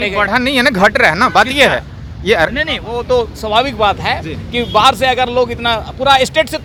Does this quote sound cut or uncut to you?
uncut